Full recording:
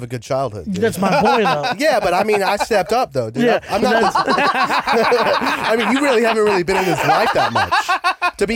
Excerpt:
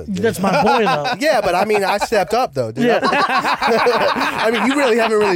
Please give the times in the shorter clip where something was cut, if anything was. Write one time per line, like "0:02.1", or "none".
0:03.0